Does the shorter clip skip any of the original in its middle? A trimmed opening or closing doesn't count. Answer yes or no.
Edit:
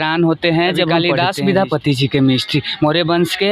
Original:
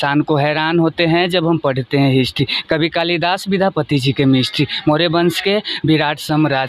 yes